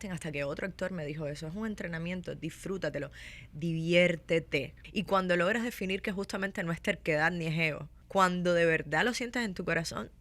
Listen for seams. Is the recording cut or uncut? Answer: cut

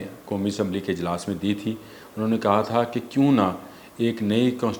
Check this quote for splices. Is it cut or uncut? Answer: uncut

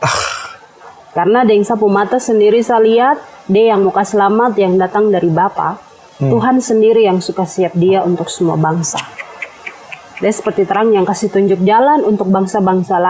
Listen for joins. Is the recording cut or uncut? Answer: uncut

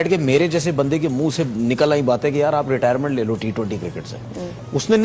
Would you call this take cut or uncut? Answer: uncut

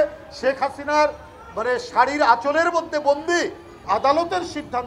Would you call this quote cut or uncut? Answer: cut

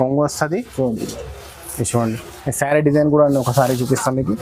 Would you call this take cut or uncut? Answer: uncut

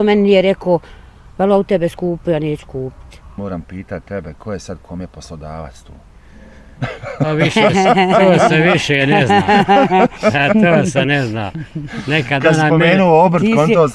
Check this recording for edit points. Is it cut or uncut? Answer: cut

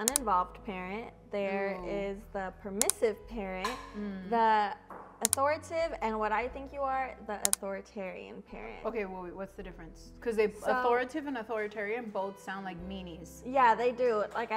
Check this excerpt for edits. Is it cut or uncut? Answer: uncut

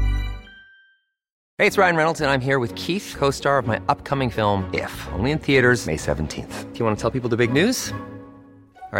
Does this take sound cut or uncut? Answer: cut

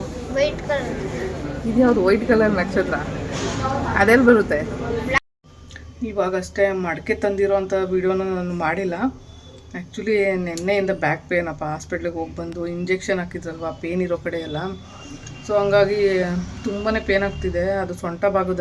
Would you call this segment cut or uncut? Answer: cut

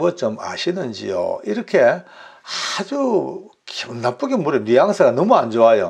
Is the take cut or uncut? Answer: uncut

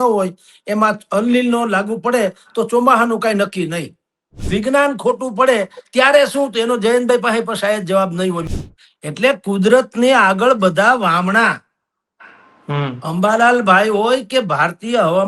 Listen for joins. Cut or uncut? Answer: cut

